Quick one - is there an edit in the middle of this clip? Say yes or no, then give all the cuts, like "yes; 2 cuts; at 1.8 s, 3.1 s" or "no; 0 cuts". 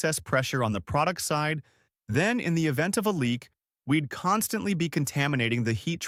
no; 0 cuts